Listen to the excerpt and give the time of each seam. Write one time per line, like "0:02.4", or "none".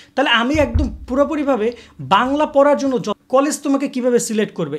0:03.2